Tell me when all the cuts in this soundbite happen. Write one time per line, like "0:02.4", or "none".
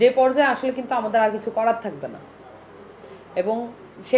none